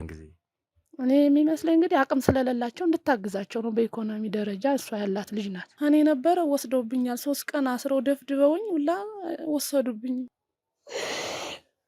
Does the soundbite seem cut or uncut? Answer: cut